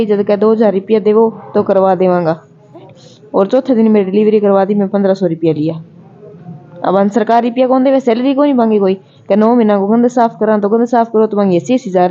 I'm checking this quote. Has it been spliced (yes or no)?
yes